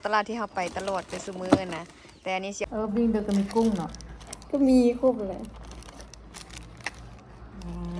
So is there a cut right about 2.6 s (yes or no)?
yes